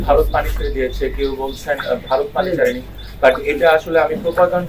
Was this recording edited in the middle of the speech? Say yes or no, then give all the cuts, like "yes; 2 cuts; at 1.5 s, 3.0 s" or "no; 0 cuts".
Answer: no; 0 cuts